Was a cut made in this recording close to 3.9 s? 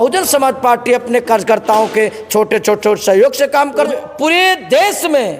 yes; 1 cut; at 3.9 s

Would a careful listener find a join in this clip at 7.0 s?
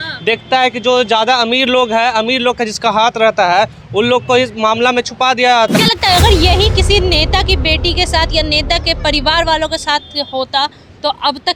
no; 1 cut; at 5.7 s

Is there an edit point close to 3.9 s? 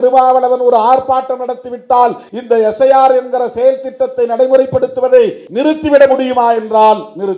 no; 2 cuts; at 2.3 s, 5.4 s

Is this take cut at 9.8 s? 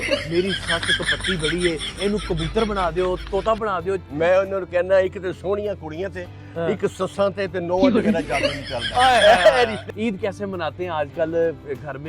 yes; 2 cuts; at 4.0 s, 9.8 s

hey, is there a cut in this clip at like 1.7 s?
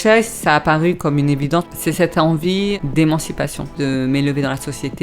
yes; 3 cuts; at 1.7 s, 2.8 s, 3.8 s

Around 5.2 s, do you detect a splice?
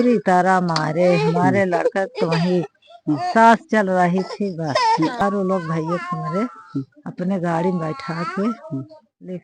yes; 1 cut; at 5.2 s

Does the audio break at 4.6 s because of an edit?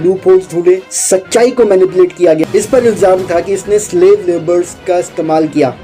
no; 1 cut; at 2.4 s

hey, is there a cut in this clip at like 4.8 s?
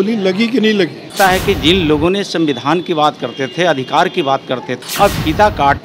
yes; 2 cuts; at 1.1 s, 4.8 s

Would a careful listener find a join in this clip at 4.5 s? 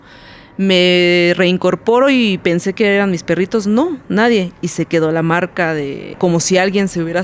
no; 1 cut; at 6.2 s

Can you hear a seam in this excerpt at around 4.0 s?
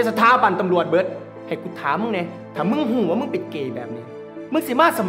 no; 2 cuts; at 1.3 s, 2.4 s

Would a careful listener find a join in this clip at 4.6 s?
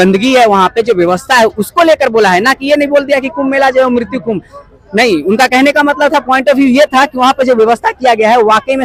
no; 0 cuts

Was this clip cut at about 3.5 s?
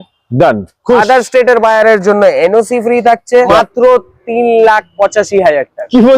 yes; 1 cut; at 3.5 s

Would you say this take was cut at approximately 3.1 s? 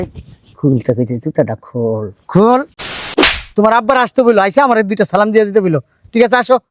yes; 1 cut; at 3.1 s

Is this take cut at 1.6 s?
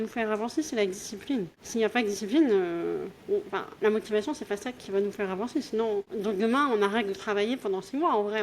yes; 3 cuts; at 1.6 s, 3.6 s, 6.1 s

